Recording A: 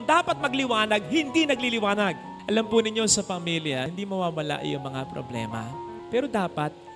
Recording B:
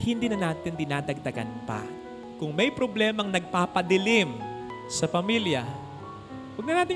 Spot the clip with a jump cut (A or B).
A